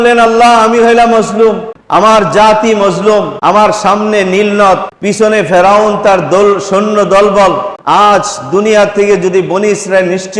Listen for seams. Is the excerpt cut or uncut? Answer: cut